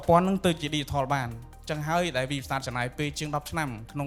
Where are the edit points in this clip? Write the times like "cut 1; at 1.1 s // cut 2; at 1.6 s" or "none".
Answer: none